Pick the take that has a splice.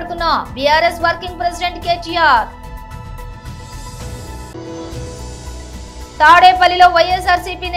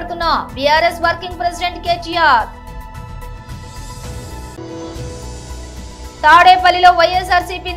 first; 3 cuts; at 2.5 s, 4.5 s, 6.1 s

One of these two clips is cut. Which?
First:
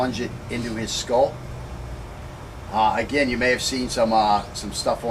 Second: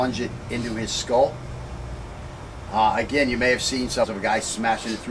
first; 1 cut; at 4.0 s

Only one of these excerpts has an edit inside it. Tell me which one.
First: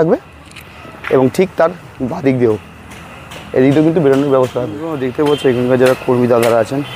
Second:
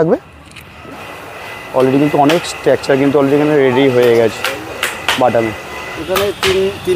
second; 2 cuts; at 1.0 s, 5.9 s

